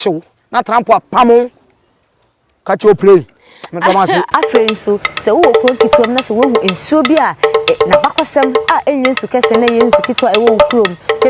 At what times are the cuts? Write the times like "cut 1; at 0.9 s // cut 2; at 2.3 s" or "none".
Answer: cut 1; at 4.3 s